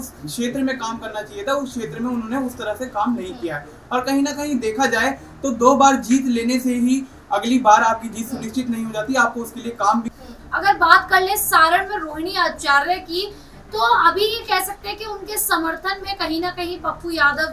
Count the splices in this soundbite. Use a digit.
1